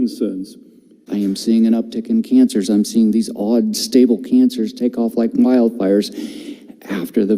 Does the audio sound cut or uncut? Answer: cut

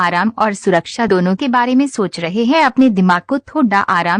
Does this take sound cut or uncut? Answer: uncut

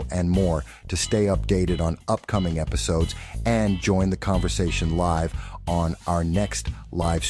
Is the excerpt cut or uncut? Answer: uncut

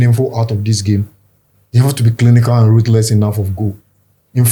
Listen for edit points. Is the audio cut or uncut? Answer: uncut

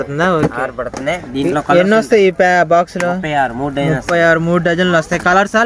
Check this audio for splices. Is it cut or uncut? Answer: uncut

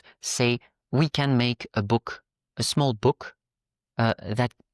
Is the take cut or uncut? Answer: uncut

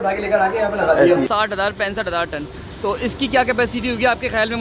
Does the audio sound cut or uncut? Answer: cut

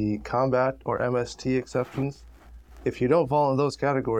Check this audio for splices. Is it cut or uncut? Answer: uncut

